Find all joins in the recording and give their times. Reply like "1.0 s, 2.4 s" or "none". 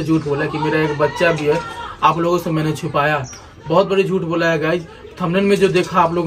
none